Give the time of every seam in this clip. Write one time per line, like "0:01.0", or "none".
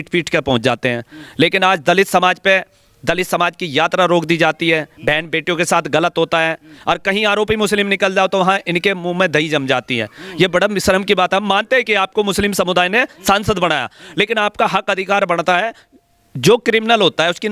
none